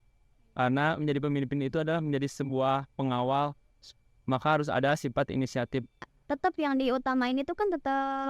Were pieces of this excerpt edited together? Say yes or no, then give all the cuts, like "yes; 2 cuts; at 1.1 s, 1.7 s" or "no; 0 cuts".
yes; 1 cut; at 6.1 s